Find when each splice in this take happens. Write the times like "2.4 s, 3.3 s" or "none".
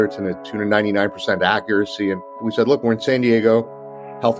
2.4 s